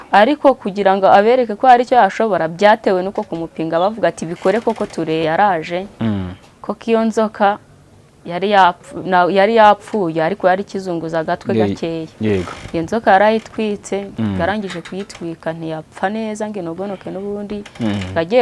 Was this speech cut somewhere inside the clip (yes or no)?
yes